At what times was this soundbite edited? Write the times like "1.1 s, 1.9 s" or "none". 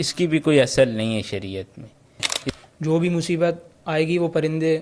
2.4 s